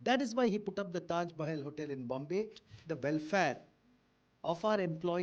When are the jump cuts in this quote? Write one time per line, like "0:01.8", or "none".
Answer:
0:02.8